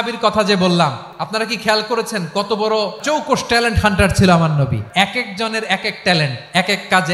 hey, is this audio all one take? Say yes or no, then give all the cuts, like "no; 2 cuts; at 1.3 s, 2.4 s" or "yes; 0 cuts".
no; 3 cuts; at 1.1 s, 3.0 s, 4.8 s